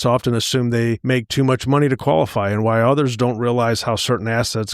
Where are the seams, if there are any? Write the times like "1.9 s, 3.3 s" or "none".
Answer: 1.0 s